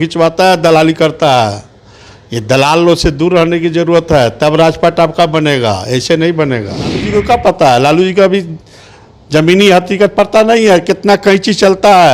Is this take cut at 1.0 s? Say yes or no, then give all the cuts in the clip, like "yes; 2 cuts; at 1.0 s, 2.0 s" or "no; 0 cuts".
no; 1 cut; at 7.0 s